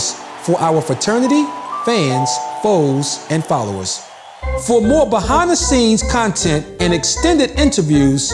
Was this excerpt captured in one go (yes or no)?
no